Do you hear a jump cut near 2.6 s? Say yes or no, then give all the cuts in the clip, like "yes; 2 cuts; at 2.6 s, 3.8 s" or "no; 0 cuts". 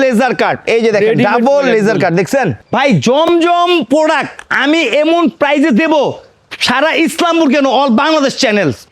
yes; 1 cut; at 2.6 s